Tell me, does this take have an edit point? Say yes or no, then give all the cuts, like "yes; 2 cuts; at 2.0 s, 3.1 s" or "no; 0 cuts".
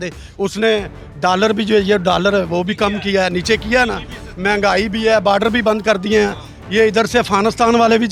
no; 0 cuts